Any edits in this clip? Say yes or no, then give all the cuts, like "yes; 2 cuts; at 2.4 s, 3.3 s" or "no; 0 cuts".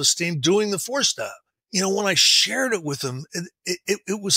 yes; 1 cut; at 1.5 s